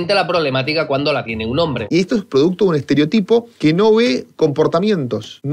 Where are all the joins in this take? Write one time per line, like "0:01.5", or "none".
0:01.8
0:03.5